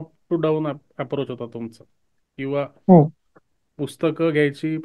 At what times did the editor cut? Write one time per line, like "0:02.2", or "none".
none